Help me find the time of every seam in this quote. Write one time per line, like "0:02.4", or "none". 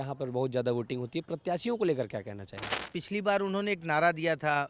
0:02.9